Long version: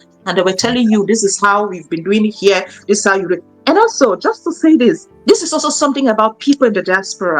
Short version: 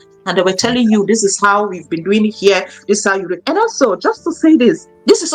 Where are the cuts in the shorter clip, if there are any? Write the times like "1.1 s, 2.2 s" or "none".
3.4 s